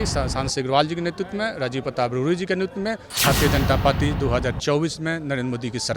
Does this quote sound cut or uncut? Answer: cut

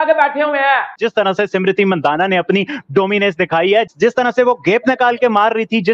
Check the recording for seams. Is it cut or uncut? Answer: cut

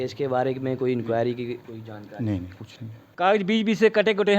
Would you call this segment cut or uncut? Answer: cut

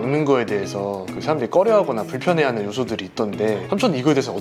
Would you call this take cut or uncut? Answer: uncut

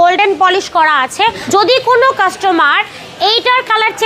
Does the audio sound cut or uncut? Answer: cut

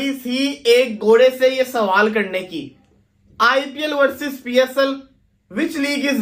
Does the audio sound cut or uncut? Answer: uncut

